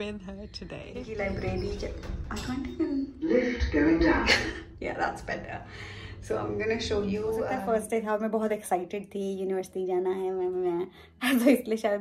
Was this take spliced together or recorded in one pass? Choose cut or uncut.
cut